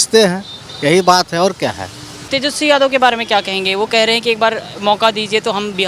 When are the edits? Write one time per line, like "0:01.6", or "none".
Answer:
0:02.2